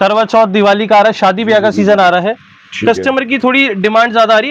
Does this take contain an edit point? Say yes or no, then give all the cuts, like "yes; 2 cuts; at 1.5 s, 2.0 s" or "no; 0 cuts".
no; 0 cuts